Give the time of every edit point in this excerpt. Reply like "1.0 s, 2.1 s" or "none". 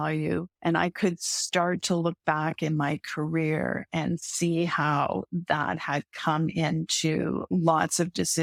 none